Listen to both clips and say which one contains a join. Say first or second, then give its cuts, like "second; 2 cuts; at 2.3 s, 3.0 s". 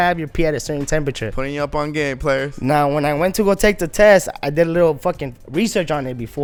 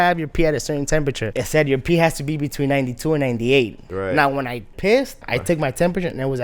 second; 3 cuts; at 1.3 s, 3.8 s, 5.2 s